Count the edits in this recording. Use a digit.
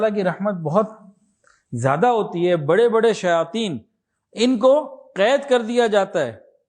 0